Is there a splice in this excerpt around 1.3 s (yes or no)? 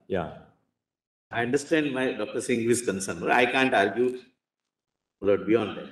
no